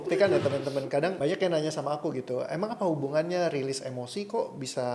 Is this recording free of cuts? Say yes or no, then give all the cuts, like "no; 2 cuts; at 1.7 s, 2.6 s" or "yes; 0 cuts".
yes; 0 cuts